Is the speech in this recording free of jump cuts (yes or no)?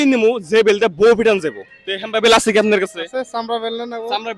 no